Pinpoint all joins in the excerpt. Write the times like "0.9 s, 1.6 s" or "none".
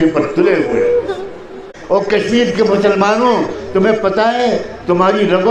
1.7 s

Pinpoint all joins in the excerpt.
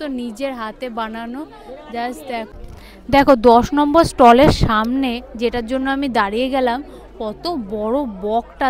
2.5 s

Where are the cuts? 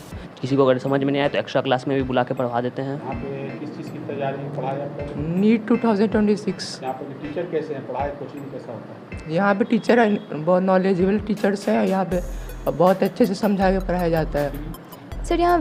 3.0 s, 14.6 s

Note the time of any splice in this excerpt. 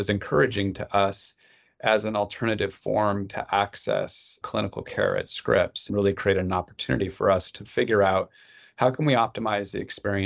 5.8 s

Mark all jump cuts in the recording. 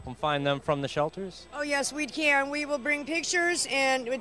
1.7 s

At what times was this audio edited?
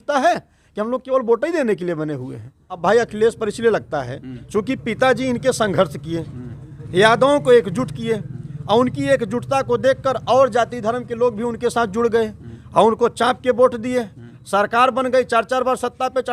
2.8 s

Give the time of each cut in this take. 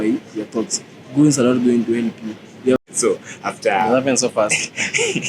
2.8 s

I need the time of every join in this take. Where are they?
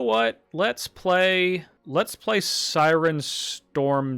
1.7 s

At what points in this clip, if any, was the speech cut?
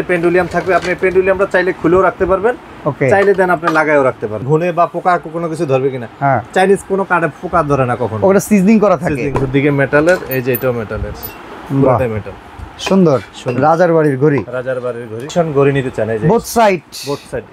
4.4 s, 9.4 s, 15.2 s

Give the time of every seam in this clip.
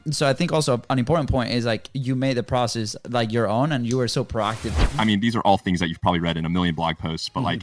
4.8 s

